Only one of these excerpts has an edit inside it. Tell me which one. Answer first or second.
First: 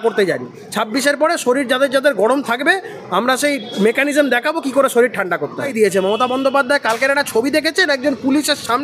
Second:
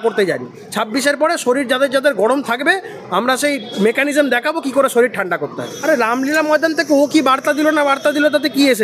first